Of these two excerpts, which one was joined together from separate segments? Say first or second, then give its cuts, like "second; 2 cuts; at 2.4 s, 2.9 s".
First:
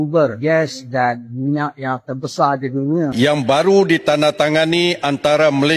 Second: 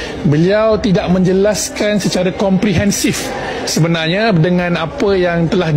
first; 1 cut; at 3.1 s